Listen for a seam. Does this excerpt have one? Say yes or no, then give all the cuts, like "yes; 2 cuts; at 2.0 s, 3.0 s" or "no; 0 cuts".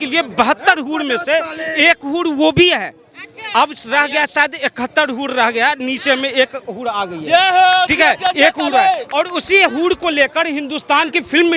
no; 0 cuts